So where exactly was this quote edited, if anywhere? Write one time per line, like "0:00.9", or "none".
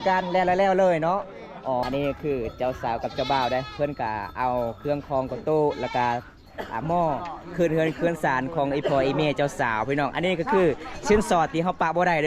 0:01.8